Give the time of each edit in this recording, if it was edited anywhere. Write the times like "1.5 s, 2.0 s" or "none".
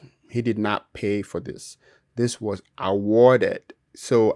none